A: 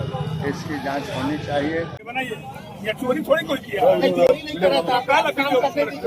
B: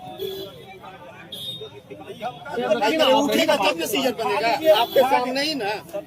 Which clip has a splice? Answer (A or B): A